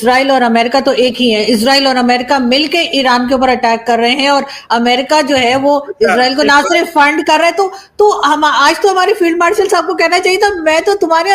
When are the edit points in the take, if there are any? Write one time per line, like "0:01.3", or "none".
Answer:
none